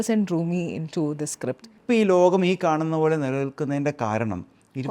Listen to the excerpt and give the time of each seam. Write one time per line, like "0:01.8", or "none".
0:01.8